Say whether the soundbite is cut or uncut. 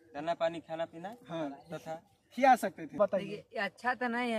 cut